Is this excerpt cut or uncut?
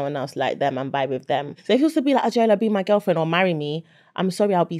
cut